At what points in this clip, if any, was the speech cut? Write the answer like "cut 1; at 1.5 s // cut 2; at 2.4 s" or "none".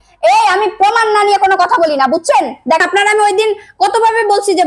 cut 1; at 2.8 s